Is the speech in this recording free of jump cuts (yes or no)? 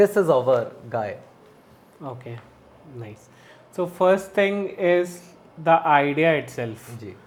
yes